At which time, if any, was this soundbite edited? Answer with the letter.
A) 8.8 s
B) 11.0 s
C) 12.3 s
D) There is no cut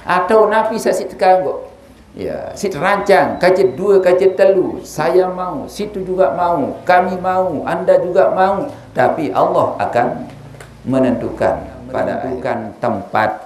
C